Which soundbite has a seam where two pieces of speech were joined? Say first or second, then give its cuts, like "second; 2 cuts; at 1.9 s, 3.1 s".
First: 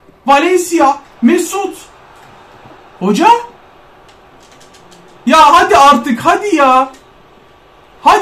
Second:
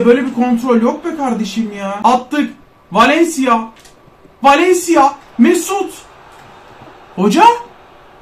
second; 1 cut; at 2.0 s